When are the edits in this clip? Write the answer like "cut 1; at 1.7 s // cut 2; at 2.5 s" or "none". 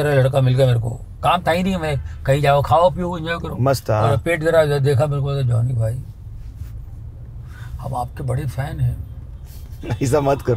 none